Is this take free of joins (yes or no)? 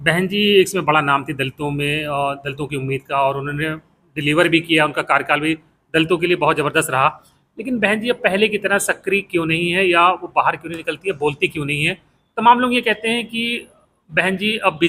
yes